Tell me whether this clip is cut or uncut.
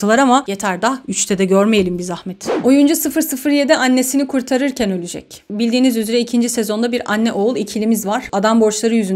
uncut